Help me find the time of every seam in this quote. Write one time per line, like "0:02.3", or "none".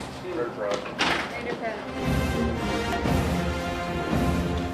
none